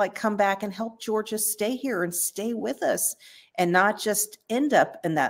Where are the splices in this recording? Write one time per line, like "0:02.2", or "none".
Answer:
none